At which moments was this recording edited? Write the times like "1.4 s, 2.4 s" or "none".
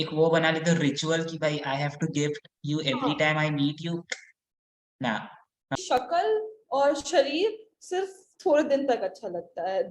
5.8 s